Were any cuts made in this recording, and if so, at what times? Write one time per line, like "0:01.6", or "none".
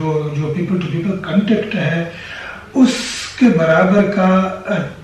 none

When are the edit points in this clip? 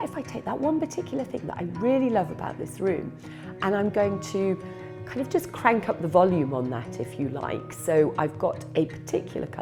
none

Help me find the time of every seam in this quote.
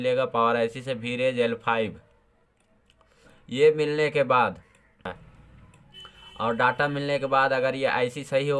0:05.1

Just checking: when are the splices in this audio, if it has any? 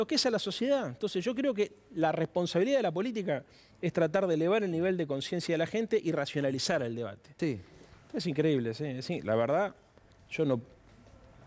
0:07.3

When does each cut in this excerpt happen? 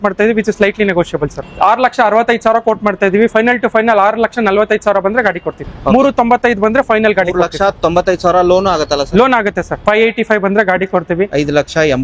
0:01.4
0:05.7
0:09.8

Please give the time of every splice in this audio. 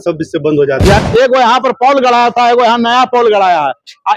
0:01.0

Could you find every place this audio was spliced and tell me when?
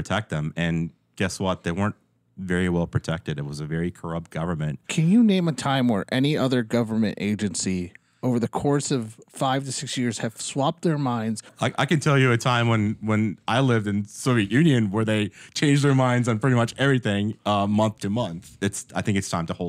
0:04.9
0:11.5
0:18.4

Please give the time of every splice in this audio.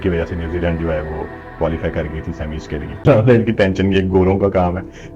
0:03.0

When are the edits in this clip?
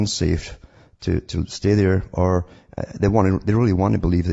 none

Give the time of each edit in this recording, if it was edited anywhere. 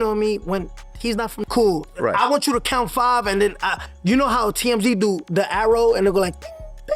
0:01.4

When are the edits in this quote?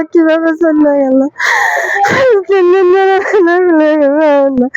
none

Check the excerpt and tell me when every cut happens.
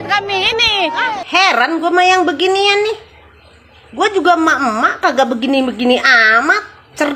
0:01.2

